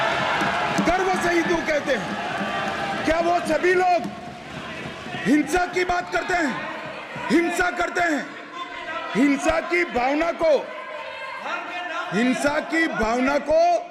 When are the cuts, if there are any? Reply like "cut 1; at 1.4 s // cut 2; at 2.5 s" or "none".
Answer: none